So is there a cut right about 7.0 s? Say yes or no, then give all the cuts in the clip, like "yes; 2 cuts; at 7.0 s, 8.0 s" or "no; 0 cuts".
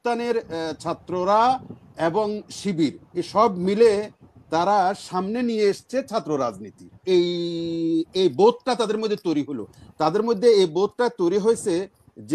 yes; 1 cut; at 7.0 s